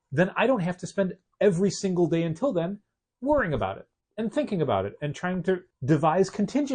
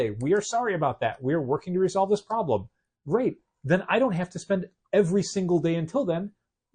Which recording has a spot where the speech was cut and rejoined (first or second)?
first